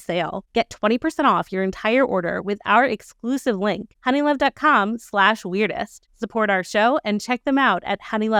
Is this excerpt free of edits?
yes; 0 cuts

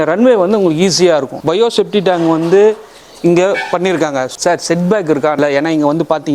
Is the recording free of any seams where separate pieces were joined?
no; 3 cuts; at 1.3 s, 4.3 s, 5.4 s

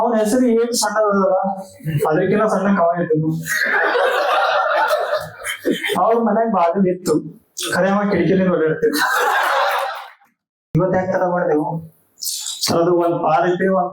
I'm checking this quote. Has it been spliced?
yes; 1 cut; at 10.2 s

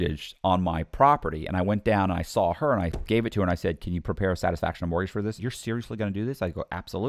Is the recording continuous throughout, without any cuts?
no; 1 cut; at 5.4 s

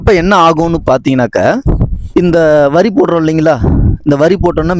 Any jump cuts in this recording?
yes; 1 cut; at 1.9 s

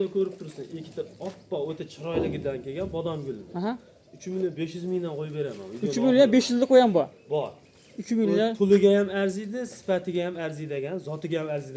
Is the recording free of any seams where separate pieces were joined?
yes; 0 cuts

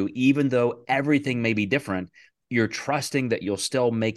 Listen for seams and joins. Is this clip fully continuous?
yes; 0 cuts

